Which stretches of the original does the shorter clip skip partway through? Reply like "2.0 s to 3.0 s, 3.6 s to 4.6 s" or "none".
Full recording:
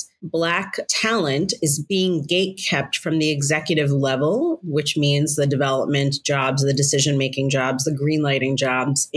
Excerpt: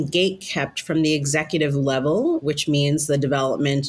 4.6 s to 4.7 s